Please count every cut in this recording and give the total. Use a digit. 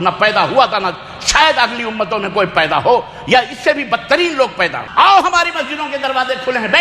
1